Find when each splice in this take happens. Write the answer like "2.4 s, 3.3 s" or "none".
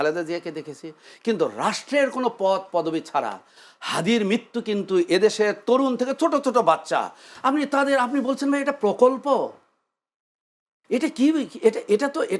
none